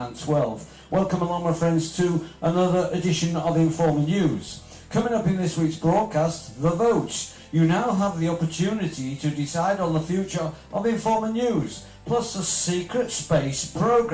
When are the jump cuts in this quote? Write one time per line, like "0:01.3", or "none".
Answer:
0:06.1